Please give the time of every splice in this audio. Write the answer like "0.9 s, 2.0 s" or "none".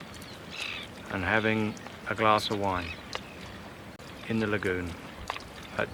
4.0 s